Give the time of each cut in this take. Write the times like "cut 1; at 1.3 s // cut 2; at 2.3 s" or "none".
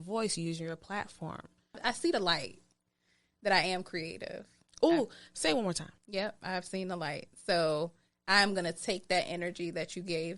cut 1; at 1.8 s // cut 2; at 5.9 s